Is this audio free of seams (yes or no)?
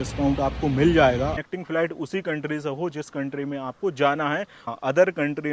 no